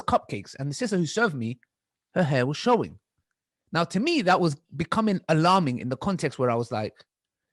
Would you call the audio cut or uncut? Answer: uncut